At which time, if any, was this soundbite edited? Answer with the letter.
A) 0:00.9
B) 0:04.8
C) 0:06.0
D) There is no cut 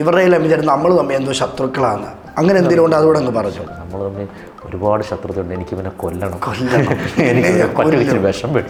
D